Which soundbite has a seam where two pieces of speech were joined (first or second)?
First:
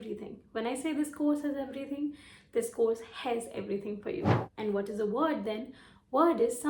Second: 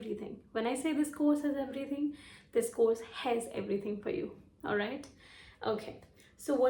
first